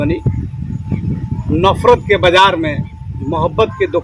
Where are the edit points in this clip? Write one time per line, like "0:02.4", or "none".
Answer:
none